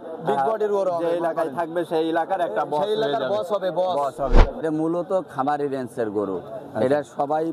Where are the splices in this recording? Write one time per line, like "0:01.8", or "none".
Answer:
0:04.6